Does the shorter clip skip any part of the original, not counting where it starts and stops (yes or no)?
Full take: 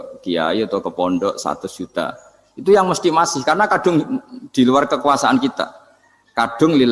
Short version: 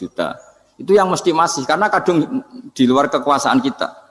no